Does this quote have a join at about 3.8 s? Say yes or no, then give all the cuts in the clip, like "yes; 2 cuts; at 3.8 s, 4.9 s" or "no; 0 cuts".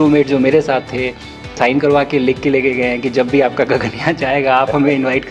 no; 1 cut; at 1.5 s